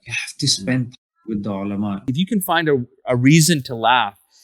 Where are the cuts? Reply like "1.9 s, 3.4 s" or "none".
2.0 s